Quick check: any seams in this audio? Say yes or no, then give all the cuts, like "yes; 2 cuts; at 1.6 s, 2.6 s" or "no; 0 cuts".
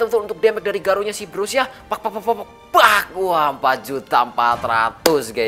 no; 0 cuts